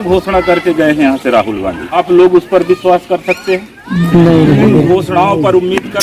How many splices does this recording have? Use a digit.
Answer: 1